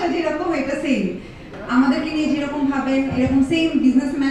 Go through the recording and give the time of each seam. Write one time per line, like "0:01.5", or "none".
0:01.5